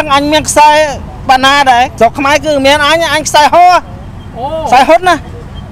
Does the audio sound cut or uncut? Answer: cut